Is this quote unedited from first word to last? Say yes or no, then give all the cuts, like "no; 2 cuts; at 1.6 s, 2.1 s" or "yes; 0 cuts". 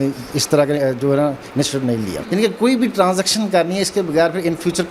no; 1 cut; at 2.2 s